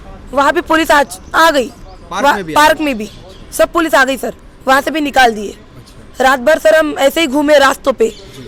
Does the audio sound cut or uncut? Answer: uncut